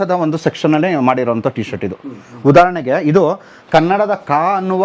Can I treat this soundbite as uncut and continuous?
yes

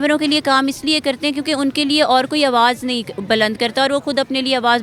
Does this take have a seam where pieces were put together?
no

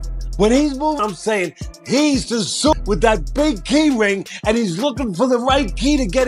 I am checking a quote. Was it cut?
yes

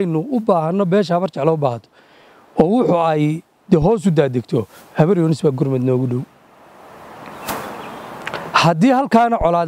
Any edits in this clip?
no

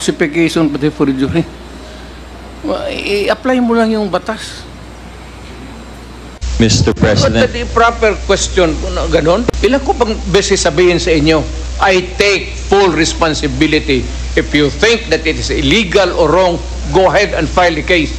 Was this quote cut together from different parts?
yes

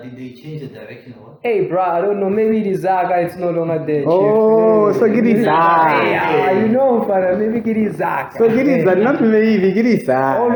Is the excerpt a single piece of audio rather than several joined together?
yes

